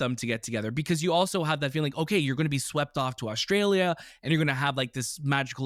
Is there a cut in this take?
no; 0 cuts

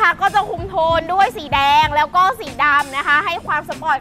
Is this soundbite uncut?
yes; 0 cuts

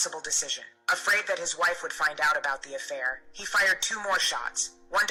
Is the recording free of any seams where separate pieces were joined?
yes; 0 cuts

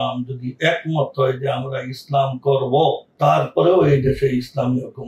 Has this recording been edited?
no; 0 cuts

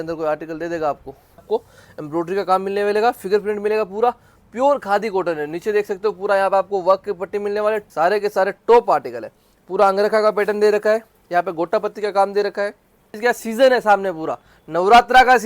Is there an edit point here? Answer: yes; 3 cuts; at 1.4 s, 7.9 s, 13.1 s

